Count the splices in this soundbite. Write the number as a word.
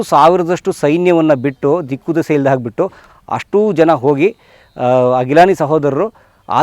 zero